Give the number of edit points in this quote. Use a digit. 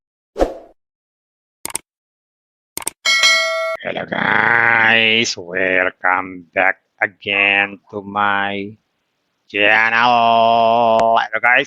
1